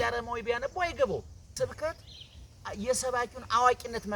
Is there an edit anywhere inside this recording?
yes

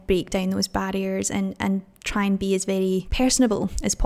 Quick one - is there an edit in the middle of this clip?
yes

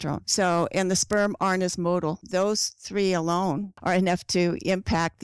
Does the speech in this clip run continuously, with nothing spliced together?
no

